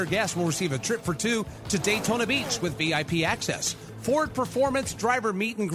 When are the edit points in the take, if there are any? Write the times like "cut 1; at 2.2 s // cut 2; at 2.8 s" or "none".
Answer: none